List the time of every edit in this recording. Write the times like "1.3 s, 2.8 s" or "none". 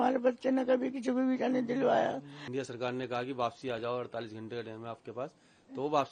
2.4 s